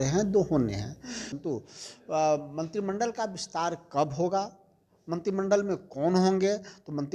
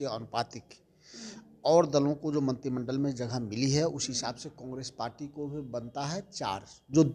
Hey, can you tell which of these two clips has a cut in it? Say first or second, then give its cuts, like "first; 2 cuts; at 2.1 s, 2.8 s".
first; 1 cut; at 1.3 s